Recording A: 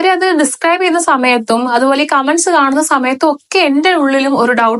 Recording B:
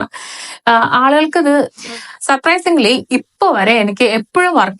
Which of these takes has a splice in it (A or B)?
B